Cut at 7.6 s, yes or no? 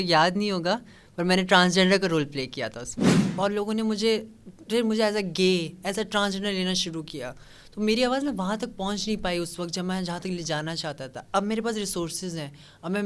no